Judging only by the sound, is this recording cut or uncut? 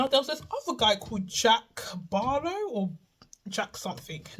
uncut